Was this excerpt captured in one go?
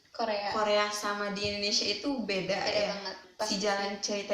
no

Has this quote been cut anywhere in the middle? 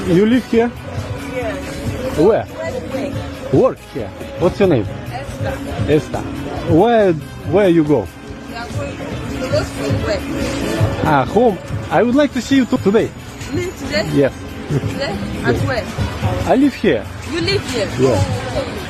no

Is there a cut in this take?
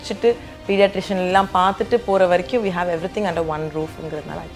no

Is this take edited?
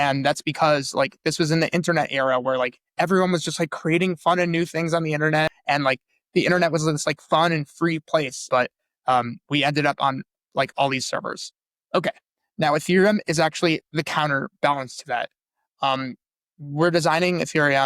yes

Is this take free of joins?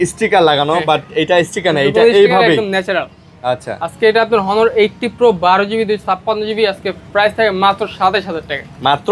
yes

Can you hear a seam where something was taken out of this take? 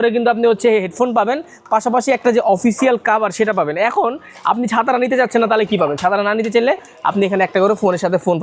no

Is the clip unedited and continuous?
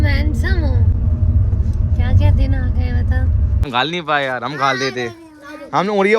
no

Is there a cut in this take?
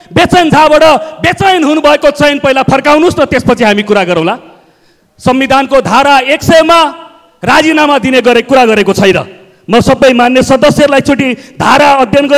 no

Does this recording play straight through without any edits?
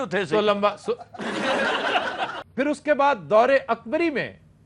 no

